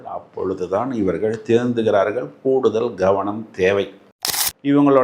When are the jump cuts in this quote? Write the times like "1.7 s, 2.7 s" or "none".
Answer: 4.1 s